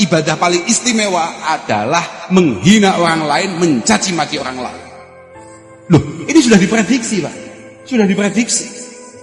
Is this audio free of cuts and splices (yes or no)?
yes